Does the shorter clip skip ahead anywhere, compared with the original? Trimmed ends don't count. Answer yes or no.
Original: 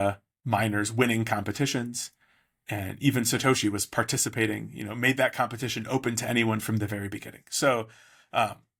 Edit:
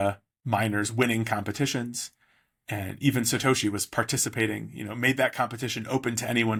no